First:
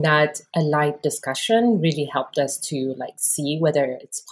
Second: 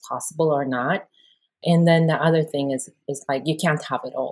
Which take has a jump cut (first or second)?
second